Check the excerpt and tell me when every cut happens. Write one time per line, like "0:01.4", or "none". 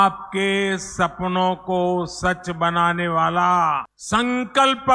0:03.9